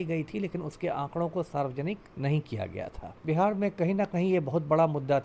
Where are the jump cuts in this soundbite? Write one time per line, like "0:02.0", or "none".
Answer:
0:02.1
0:03.2